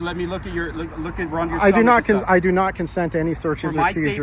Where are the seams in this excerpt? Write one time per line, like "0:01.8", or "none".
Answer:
none